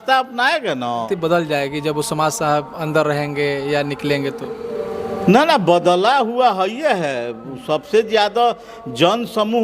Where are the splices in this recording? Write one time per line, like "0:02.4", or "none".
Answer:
0:01.0